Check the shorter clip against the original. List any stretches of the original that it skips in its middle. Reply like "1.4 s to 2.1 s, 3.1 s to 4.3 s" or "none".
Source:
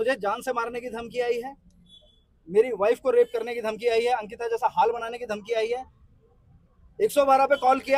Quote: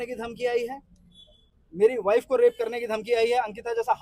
none